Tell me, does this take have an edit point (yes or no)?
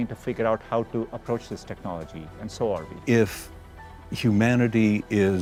no